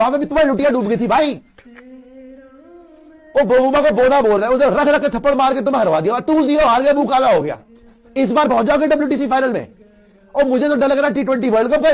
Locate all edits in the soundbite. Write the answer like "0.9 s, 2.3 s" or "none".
none